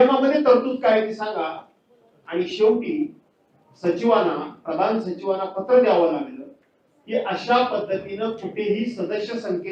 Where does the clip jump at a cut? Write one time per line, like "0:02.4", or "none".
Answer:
none